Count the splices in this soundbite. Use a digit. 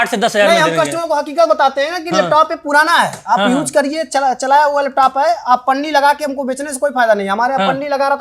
0